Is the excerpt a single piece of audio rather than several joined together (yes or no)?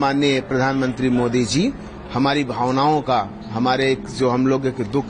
yes